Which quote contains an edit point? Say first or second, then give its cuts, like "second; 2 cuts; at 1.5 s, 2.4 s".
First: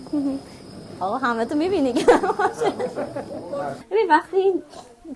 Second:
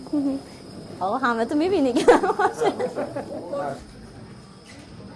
first; 1 cut; at 3.8 s